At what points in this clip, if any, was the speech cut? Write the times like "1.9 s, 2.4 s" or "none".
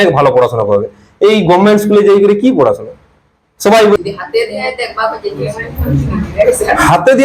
4.0 s